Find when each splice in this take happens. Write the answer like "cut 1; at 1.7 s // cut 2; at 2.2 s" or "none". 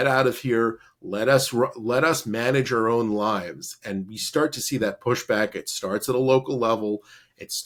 none